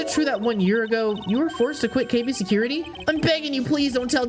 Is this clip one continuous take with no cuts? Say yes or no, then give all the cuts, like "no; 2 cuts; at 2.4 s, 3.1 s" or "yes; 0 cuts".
no; 1 cut; at 2.9 s